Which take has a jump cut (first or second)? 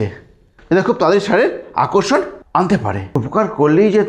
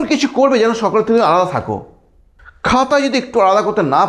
first